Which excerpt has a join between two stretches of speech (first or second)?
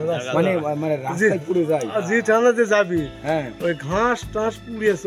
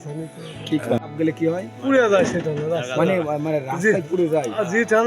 second